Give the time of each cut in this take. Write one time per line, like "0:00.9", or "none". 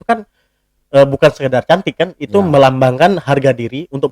none